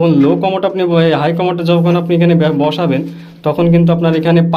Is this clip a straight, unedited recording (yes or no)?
yes